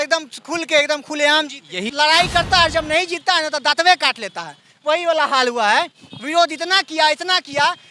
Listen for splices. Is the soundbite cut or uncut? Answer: cut